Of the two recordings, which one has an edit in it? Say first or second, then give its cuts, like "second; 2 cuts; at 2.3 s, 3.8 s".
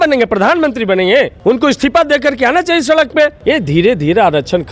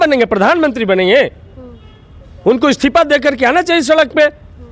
first; 2 cuts; at 1.3 s, 3.4 s